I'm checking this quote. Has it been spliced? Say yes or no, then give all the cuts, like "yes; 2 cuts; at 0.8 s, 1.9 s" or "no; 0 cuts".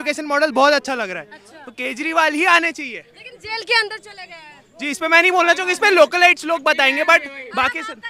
no; 0 cuts